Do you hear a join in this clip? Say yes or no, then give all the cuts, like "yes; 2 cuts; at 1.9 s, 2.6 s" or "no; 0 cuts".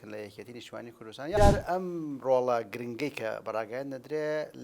yes; 1 cut; at 1.4 s